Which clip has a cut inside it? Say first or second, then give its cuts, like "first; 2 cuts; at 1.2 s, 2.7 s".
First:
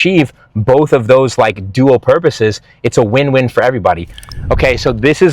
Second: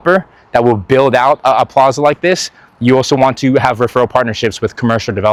first; 1 cut; at 4.1 s